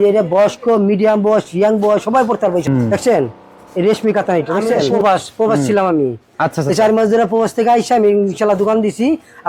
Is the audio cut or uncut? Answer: cut